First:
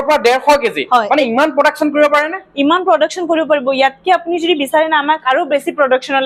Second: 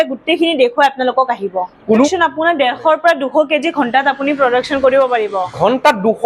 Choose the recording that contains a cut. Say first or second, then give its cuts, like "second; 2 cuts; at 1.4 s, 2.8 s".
second; 1 cut; at 2.1 s